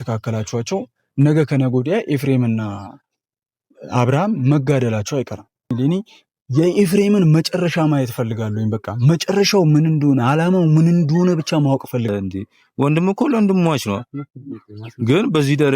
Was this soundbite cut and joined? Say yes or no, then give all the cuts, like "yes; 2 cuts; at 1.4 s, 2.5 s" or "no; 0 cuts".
yes; 2 cuts; at 5.7 s, 12.1 s